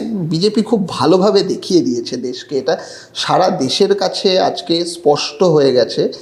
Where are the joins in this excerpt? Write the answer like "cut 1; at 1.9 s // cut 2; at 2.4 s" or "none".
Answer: none